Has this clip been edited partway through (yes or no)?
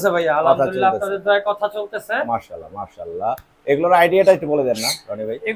no